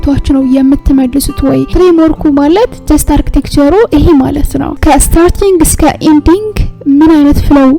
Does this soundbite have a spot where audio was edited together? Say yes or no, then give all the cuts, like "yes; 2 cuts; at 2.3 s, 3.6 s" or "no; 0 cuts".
yes; 1 cut; at 1.7 s